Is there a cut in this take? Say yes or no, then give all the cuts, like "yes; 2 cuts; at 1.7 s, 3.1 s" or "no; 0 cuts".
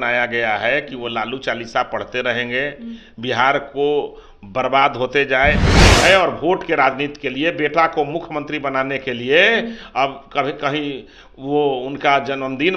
yes; 1 cut; at 6.0 s